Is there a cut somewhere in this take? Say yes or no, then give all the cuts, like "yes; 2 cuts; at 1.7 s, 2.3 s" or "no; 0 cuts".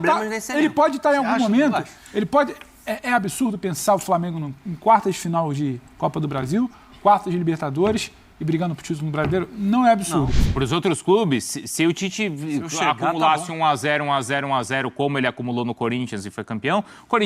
yes; 1 cut; at 10.5 s